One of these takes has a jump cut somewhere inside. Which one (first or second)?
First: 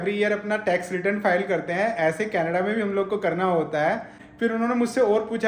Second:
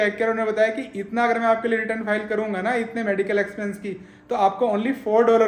first